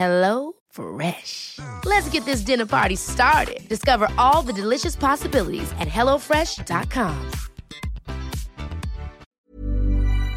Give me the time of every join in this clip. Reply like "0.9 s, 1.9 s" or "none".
9.2 s